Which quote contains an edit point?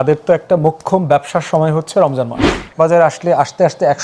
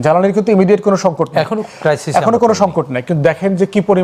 first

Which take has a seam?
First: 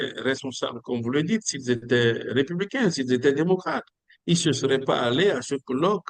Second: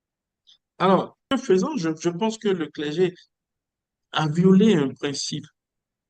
second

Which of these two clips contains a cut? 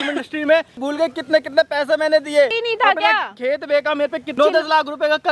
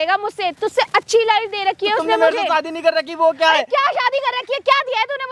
first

